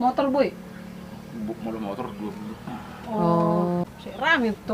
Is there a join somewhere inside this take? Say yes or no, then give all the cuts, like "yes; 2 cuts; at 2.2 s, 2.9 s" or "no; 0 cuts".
yes; 1 cut; at 3.8 s